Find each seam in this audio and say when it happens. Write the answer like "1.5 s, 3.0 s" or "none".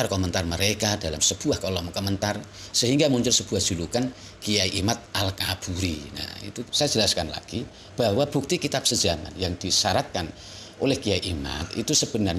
6.6 s